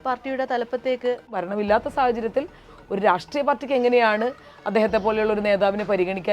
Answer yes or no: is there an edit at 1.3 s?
yes